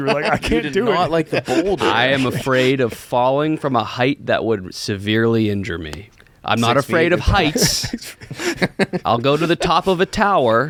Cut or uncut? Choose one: uncut